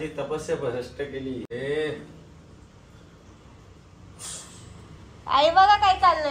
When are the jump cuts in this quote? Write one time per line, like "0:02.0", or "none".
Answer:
0:01.5